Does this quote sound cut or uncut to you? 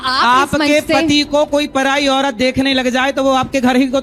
uncut